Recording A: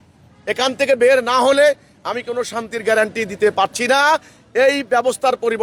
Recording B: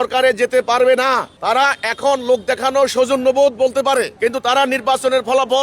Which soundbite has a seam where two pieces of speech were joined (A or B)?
B